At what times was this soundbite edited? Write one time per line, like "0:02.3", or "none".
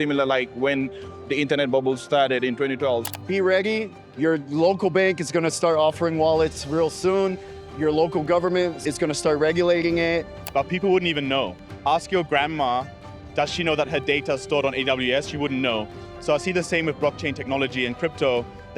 0:03.1
0:08.8
0:10.3